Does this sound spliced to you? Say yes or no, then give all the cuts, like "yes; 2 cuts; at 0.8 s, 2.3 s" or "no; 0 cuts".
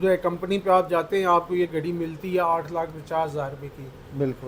no; 0 cuts